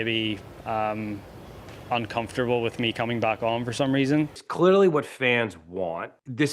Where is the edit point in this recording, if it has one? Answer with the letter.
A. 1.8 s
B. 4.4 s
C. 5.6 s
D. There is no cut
B